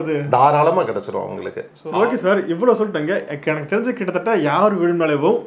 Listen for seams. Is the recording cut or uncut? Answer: cut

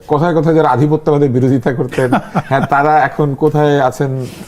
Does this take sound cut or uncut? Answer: uncut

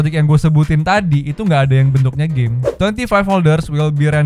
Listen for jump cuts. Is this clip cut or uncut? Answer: cut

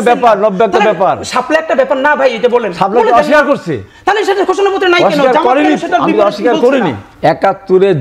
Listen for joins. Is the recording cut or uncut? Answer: cut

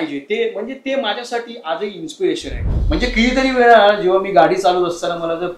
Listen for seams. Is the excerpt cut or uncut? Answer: cut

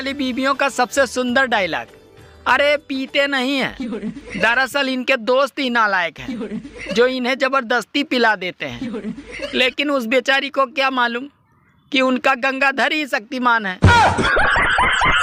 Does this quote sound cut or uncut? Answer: uncut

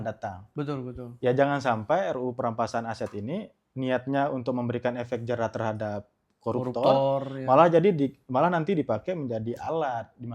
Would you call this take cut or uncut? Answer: uncut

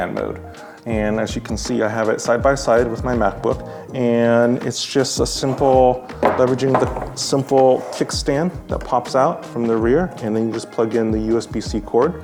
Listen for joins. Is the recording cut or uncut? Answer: uncut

